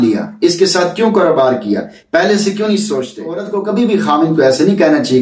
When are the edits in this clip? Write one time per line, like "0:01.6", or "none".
0:03.5